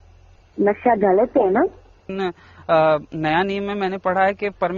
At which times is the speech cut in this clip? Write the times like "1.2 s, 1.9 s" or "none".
2.0 s